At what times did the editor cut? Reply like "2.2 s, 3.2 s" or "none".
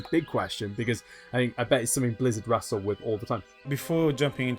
3.6 s